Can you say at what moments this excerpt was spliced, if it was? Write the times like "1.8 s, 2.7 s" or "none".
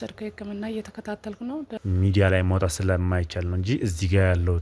1.7 s